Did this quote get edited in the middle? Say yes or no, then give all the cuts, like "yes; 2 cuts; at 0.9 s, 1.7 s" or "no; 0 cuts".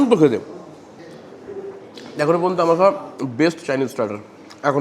no; 0 cuts